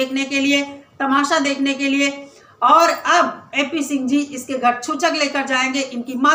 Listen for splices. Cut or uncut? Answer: uncut